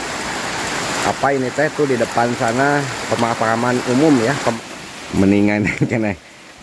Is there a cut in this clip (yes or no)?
yes